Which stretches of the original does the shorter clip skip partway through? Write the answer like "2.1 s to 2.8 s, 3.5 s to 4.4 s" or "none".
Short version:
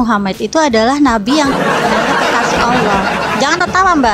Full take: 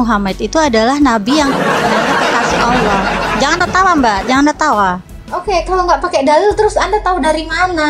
none